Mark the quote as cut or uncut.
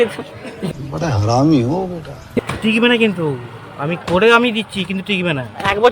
cut